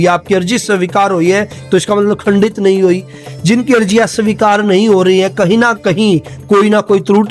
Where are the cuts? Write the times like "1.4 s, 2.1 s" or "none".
none